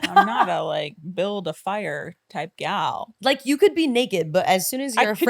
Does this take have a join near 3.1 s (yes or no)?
yes